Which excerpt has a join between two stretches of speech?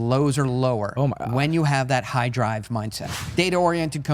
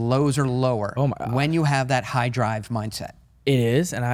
first; 1 cut; at 3.1 s

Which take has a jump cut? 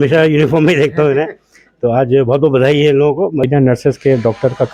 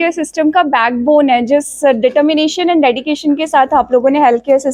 first; 1 cut; at 3.5 s

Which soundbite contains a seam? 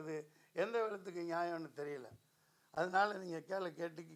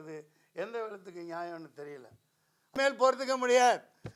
second; 1 cut; at 2.8 s

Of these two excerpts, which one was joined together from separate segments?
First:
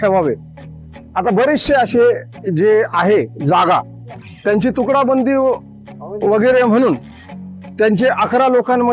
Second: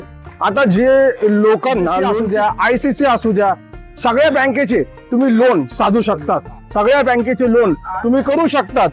second; 1 cut; at 2.1 s

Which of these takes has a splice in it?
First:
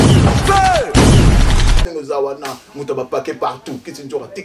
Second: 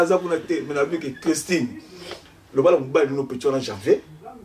first; 1 cut; at 1.9 s

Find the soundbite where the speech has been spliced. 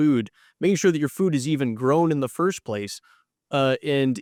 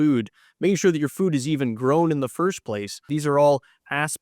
second; 1 cut; at 3.0 s

